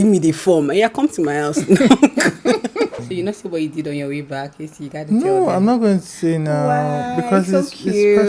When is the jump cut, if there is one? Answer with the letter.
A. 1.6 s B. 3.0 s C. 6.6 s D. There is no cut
B